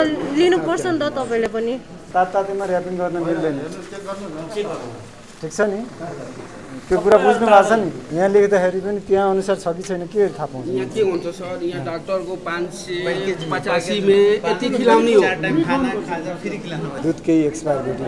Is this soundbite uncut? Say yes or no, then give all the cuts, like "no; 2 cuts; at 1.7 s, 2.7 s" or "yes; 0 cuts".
no; 3 cuts; at 2.1 s, 8.0 s, 17.0 s